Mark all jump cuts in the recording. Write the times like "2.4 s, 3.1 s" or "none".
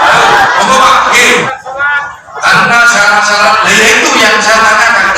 1.5 s